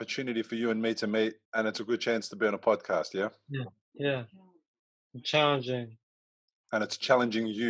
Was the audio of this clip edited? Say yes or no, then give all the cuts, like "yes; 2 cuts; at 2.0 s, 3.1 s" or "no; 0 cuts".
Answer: yes; 1 cut; at 1.4 s